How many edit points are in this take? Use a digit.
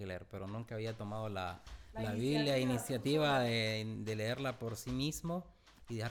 0